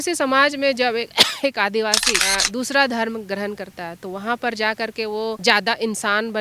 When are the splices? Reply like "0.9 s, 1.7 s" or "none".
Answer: 2.2 s, 5.4 s